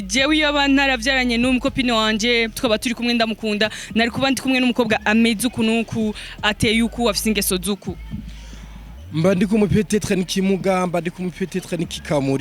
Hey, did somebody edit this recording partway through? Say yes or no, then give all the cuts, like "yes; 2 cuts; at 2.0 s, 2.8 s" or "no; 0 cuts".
no; 0 cuts